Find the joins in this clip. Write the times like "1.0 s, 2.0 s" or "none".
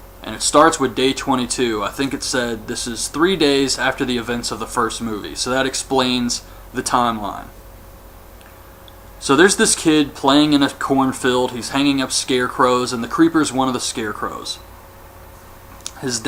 none